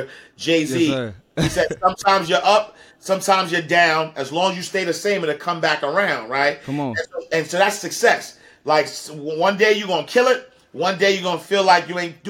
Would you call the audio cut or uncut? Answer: uncut